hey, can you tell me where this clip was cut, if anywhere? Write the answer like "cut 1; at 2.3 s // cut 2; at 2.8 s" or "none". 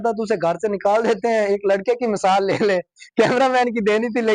none